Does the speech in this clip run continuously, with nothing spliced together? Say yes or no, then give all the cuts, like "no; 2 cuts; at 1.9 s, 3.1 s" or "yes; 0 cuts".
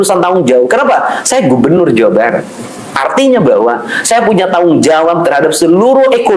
yes; 0 cuts